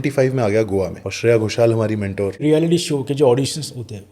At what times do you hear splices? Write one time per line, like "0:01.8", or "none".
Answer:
0:01.0
0:02.4